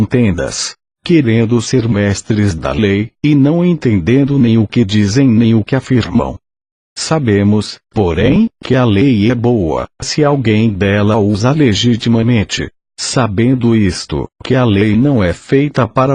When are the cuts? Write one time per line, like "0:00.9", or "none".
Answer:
0:13.0